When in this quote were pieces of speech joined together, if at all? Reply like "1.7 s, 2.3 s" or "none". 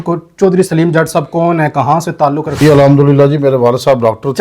2.5 s